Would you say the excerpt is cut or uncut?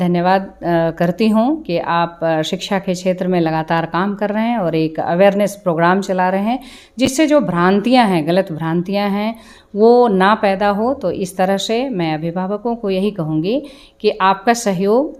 uncut